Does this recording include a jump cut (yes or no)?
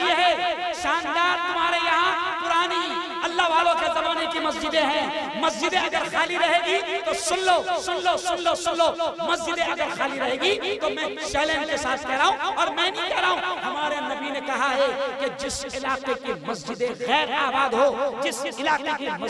no